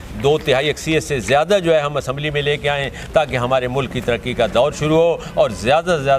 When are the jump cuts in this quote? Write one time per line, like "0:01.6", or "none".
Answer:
none